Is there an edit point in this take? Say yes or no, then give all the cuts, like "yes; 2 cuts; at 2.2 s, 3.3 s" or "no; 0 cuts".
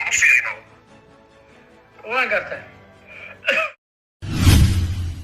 yes; 1 cut; at 3.7 s